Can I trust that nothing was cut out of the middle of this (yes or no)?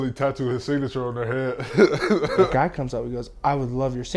no